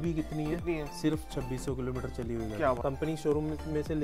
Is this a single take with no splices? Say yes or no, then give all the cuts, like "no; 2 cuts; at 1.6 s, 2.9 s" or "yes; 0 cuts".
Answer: no; 1 cut; at 2.8 s